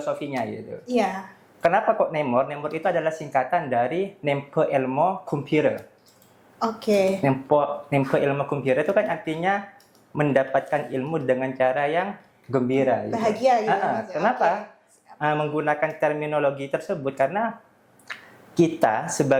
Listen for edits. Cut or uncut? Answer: uncut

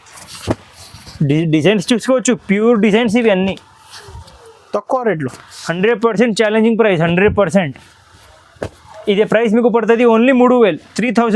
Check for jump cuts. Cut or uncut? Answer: uncut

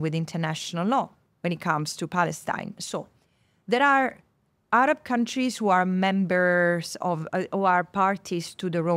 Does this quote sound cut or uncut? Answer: uncut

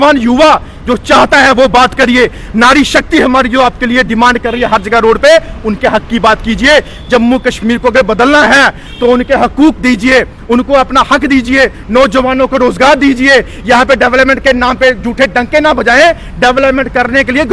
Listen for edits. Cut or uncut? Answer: uncut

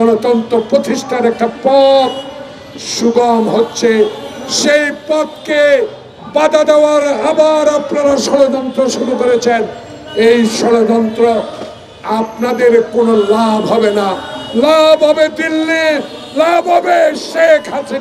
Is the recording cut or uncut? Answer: uncut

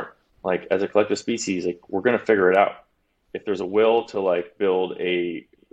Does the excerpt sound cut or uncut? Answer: uncut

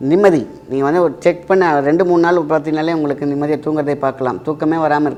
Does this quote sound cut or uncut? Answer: uncut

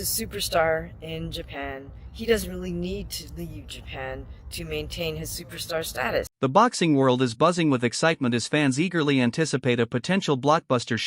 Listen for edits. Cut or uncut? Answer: cut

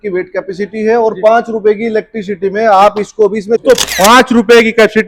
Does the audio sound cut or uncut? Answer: cut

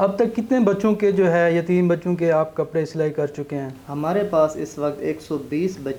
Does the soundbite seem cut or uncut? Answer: uncut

